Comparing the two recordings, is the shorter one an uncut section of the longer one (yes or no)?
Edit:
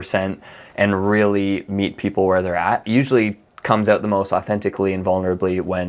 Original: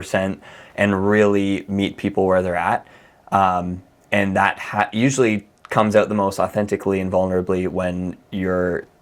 no